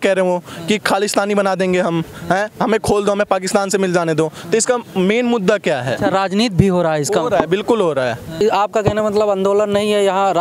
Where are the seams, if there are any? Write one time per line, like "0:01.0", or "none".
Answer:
0:08.4

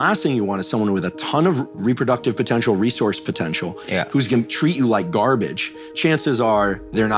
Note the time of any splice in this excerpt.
none

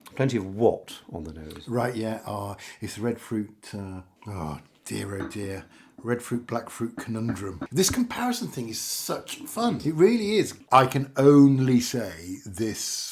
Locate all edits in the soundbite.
0:04.1
0:07.6
0:09.8
0:10.6

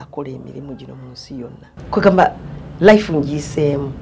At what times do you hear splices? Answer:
0:01.8

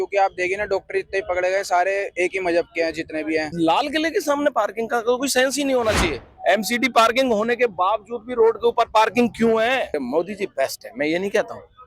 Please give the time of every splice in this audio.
0:03.5
0:06.3
0:10.0

